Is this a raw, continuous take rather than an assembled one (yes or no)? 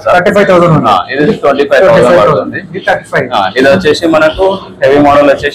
yes